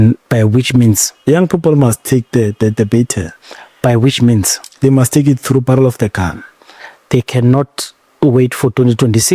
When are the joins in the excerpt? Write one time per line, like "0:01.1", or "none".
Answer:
none